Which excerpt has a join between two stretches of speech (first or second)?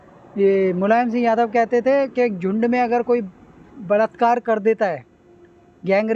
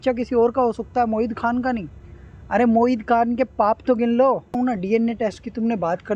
second